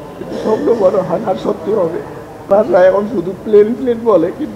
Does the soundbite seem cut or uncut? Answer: cut